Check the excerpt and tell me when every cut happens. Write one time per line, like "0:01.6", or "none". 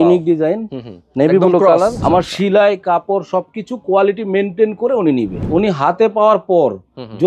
0:02.0
0:05.4

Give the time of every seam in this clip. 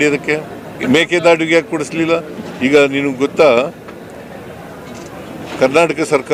none

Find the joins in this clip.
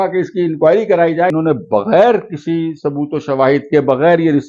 0:01.3

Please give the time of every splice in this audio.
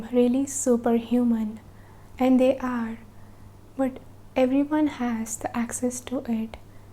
none

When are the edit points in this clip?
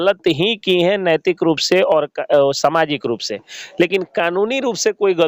none

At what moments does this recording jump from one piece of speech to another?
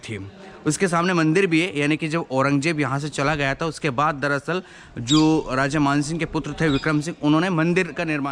none

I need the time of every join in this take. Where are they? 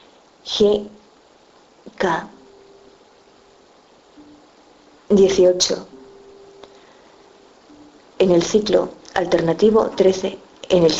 none

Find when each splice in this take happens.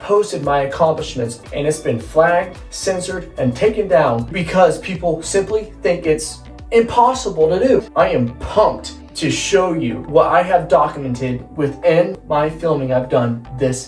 0:01.3
0:04.4
0:07.9
0:10.1
0:12.2

